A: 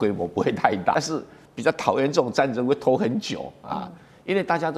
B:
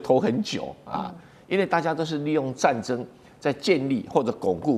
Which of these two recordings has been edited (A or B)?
A